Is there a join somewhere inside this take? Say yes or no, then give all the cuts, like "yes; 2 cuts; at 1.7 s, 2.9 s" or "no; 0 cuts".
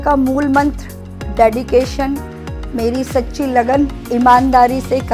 yes; 1 cut; at 4.0 s